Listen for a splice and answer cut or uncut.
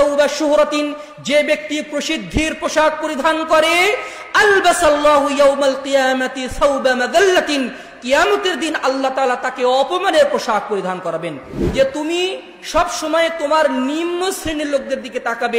cut